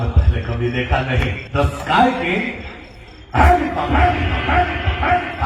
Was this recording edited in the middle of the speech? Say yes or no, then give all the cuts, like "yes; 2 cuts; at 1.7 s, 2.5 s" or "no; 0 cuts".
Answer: yes; 1 cut; at 1.4 s